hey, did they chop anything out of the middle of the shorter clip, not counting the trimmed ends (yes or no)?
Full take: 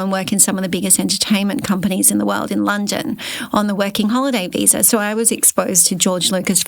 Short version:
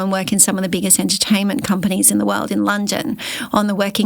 no